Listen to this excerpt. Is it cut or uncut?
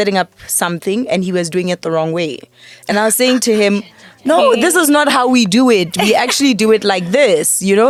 uncut